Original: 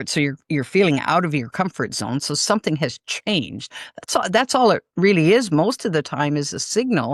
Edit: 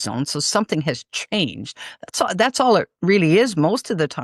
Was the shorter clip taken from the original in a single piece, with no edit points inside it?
yes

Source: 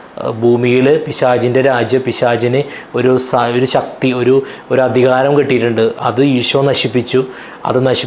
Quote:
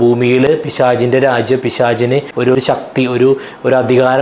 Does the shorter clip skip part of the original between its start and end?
yes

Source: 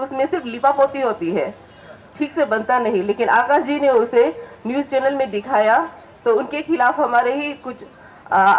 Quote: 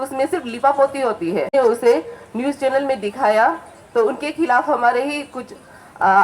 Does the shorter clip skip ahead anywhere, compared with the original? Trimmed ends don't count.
yes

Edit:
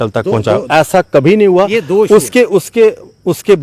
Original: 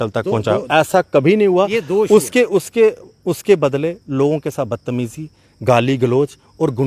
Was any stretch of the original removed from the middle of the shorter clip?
no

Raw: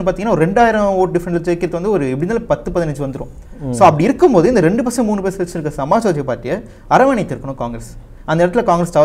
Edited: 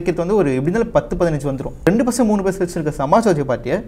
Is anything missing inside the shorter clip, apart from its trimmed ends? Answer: yes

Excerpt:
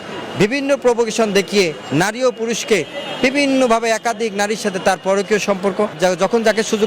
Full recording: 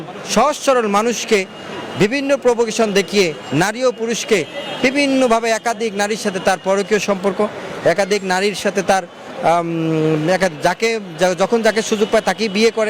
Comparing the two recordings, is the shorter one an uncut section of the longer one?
no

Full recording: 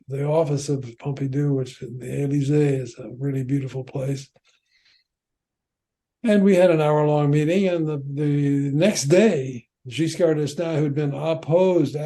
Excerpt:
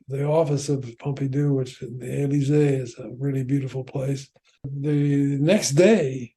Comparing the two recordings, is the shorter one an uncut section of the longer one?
no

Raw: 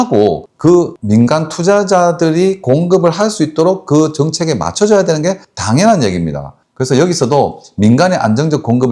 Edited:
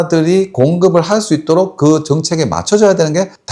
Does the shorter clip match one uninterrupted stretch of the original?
yes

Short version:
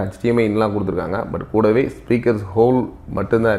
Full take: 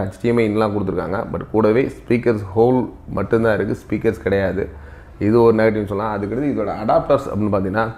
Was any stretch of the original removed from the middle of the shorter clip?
no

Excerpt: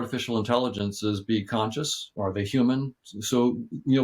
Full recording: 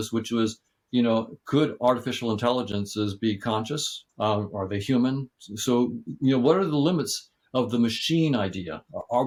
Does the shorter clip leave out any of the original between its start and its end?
yes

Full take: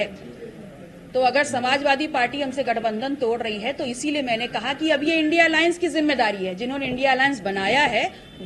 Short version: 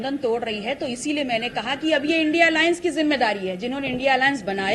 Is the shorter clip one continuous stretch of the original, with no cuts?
yes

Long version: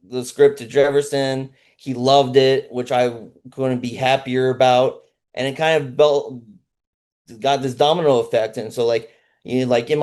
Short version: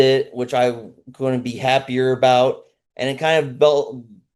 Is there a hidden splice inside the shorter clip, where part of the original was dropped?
no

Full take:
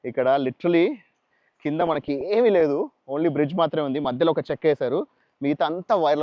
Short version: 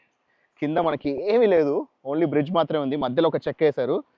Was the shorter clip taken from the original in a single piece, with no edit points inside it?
yes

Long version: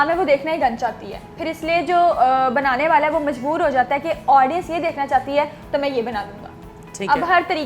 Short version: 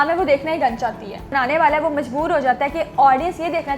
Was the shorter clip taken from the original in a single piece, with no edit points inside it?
no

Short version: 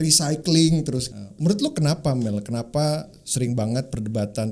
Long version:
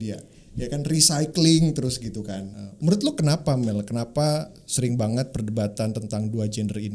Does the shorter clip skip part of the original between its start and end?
yes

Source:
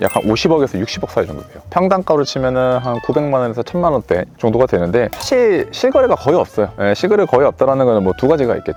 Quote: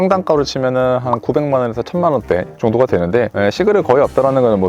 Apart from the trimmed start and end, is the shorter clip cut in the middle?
yes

